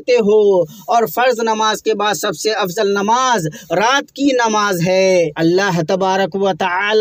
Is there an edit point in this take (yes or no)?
yes